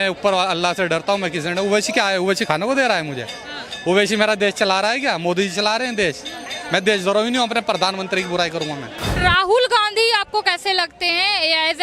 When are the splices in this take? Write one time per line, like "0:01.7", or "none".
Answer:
0:06.5
0:09.1